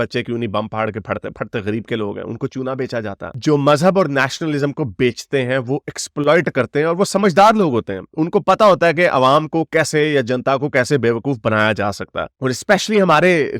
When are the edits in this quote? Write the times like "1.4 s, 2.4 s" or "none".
none